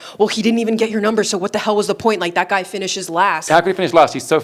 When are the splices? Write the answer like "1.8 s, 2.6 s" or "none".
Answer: 3.4 s

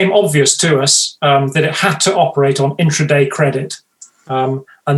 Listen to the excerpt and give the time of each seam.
none

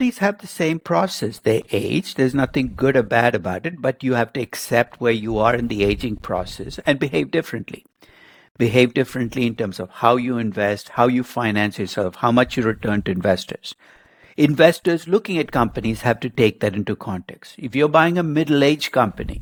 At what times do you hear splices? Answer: none

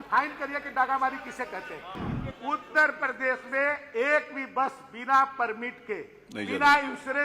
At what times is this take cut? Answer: 1.9 s

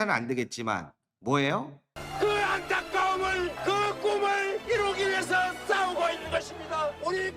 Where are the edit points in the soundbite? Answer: 2.0 s

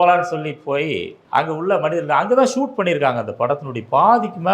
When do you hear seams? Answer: 1.1 s

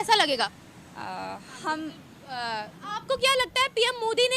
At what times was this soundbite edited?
2.8 s

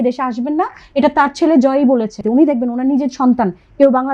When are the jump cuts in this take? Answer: 2.2 s

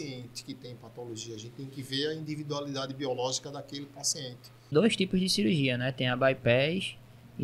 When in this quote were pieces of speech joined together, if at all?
4.7 s

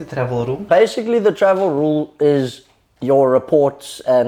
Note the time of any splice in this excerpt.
none

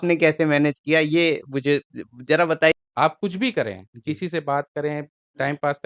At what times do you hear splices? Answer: 2.7 s

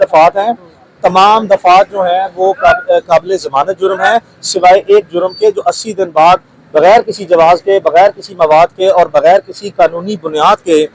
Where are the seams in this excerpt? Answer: none

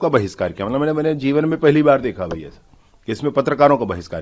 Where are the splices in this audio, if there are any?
none

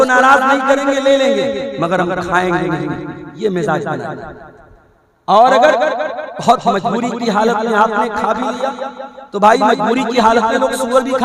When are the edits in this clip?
none

